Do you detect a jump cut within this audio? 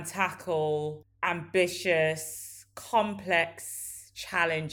yes; 1 cut; at 1.1 s

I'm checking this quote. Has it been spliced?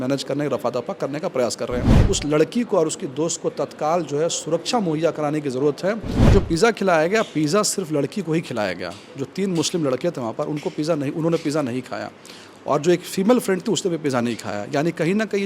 yes; 2 cuts; at 1.9 s, 6.3 s

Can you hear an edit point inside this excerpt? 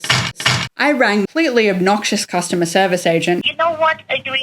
yes; 2 cuts; at 1.2 s, 3.5 s

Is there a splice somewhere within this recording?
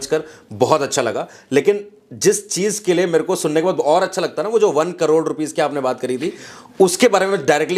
no; 0 cuts

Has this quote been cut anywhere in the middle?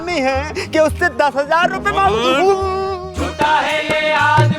yes; 1 cut; at 2.9 s

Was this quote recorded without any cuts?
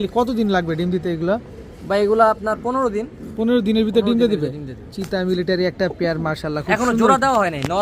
yes; 0 cuts

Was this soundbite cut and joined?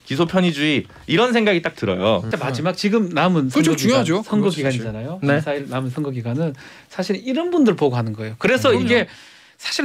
yes; 1 cut; at 2.4 s

